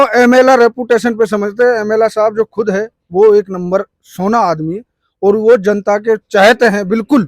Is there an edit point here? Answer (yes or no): no